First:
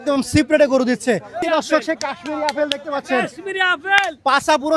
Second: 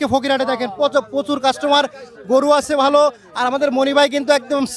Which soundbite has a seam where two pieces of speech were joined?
first; 1 cut; at 1.4 s

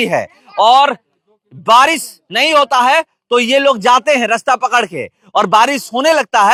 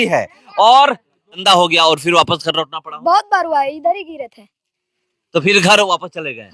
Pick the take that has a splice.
second; 1 cut; at 1.4 s

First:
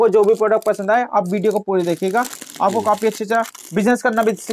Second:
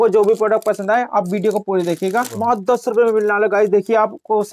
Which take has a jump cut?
second; 1 cut; at 2.3 s

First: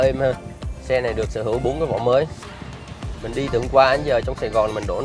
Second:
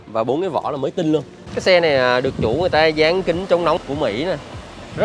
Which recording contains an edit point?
second; 2 cuts; at 1.4 s, 3.8 s

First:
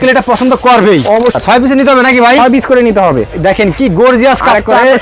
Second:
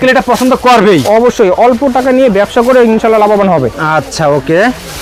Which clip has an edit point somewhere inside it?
first; 1 cut; at 1.3 s

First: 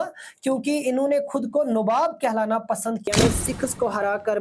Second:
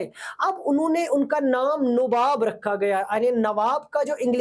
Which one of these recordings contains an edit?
first; 1 cut; at 3.0 s

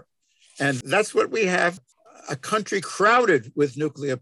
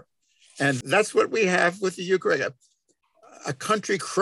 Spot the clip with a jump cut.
first; 1 cut; at 1.8 s

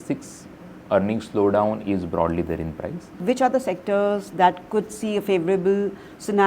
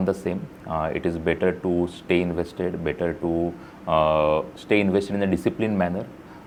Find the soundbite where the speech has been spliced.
first; 1 cut; at 3.2 s

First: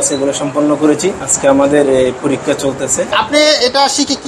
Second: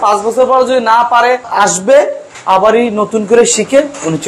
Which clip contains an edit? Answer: first; 2 cuts; at 1.3 s, 3.1 s

